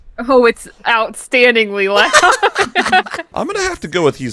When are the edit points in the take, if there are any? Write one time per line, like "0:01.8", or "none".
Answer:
0:03.2